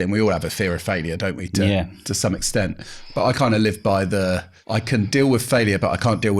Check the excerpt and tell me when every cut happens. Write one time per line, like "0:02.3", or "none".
0:04.5